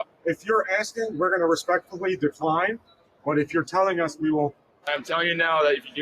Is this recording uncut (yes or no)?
no